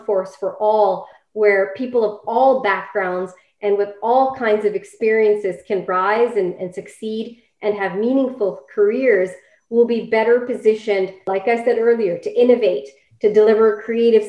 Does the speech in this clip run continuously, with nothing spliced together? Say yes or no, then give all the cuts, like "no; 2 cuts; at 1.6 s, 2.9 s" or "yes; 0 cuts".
yes; 0 cuts